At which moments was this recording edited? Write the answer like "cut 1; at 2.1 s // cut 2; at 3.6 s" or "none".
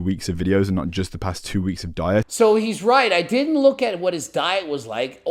cut 1; at 2.3 s

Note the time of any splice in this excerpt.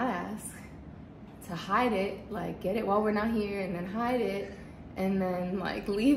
none

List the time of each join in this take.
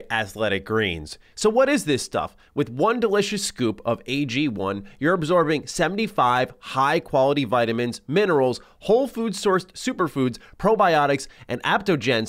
cut 1; at 1.2 s

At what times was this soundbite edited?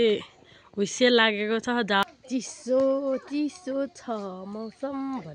cut 1; at 2.0 s

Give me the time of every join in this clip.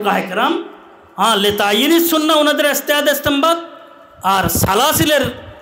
none

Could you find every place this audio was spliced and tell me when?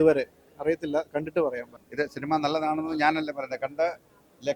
cut 1; at 1.7 s

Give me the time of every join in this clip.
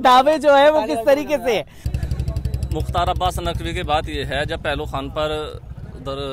cut 1; at 1.8 s

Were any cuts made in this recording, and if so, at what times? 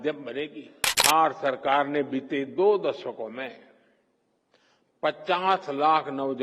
cut 1; at 1.0 s

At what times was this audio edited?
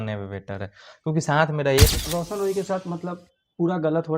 cut 1; at 1.9 s

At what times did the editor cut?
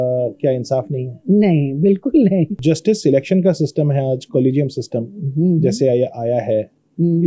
cut 1; at 2.6 s

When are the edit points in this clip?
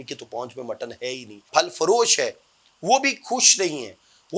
cut 1; at 1.3 s

